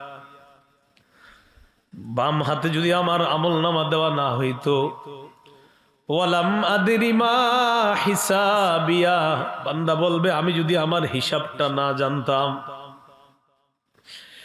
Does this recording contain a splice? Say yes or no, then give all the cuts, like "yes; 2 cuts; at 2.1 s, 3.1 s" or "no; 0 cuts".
no; 0 cuts